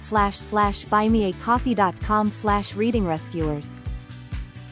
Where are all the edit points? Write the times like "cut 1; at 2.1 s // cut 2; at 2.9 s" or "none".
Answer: none